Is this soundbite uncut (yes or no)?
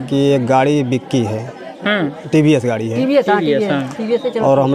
yes